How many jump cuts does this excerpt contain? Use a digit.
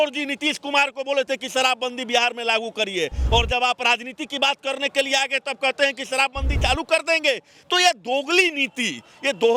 0